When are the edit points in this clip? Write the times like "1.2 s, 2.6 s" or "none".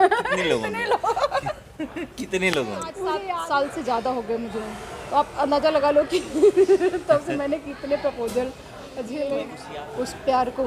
3.1 s, 9.6 s